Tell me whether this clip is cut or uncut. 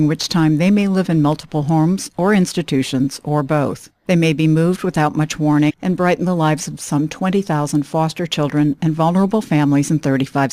uncut